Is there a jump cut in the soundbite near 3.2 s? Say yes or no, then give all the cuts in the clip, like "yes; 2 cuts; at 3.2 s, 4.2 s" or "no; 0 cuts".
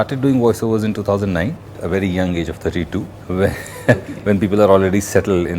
yes; 2 cuts; at 1.8 s, 3.2 s